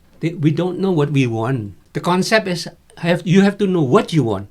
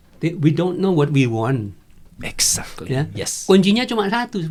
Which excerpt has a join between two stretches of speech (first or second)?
first